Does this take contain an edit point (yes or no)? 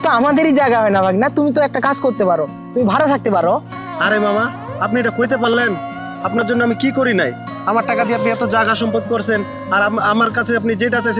no